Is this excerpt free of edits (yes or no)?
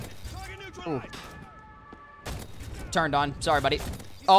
no